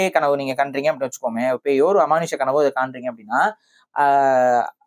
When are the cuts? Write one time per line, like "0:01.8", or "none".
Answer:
none